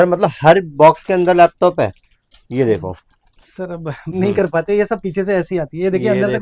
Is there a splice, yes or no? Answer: yes